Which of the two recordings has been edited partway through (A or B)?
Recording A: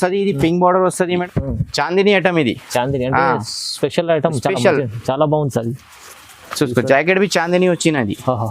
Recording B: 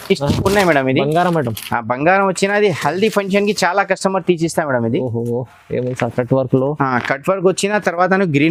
A